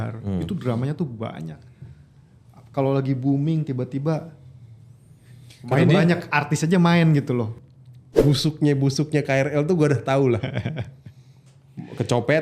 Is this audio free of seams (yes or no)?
no